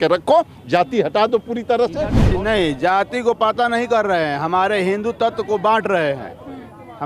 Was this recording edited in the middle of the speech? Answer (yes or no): yes